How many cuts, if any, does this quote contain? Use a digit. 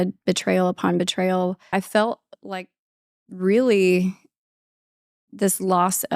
1